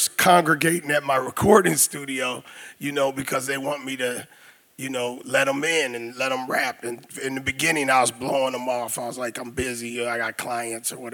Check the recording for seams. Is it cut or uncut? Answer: uncut